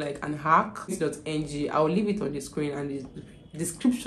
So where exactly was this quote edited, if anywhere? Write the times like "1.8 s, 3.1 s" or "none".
0.9 s